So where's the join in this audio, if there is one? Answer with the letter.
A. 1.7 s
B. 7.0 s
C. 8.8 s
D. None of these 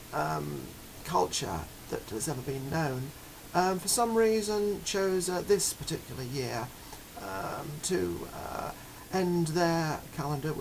D